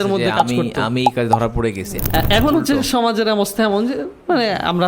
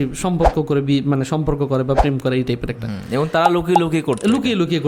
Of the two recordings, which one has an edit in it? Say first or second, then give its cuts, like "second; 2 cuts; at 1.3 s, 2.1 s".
first; 1 cut; at 1.9 s